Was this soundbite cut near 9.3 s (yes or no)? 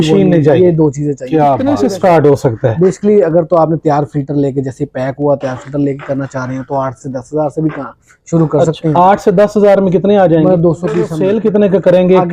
no